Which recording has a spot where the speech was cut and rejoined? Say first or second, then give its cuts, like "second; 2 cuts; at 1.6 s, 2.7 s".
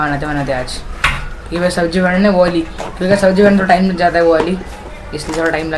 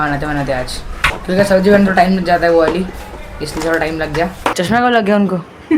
second; 2 cuts; at 1.1 s, 4.5 s